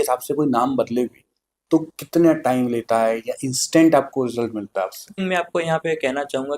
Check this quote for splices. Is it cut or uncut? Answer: cut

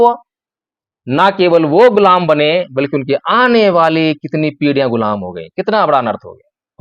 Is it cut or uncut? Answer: uncut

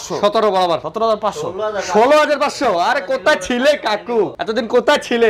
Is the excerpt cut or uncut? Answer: cut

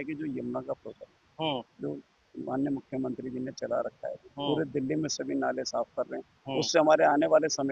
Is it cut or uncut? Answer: uncut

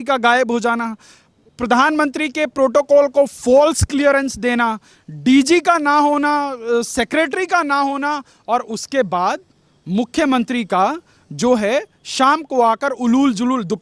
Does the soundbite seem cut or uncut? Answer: uncut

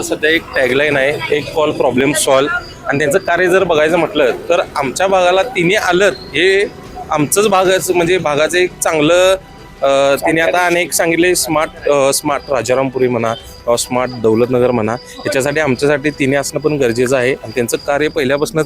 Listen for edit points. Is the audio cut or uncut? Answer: uncut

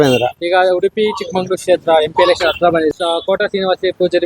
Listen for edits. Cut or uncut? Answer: cut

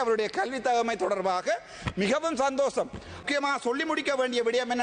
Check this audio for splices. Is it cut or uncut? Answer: cut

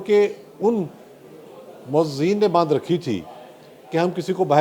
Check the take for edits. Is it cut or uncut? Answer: uncut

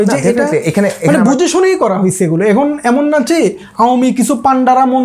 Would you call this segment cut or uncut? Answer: uncut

